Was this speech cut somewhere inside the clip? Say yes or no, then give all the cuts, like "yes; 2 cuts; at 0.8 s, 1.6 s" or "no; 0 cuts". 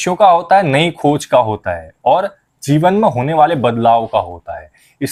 no; 0 cuts